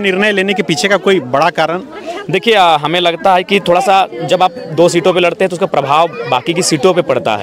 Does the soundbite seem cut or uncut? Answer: uncut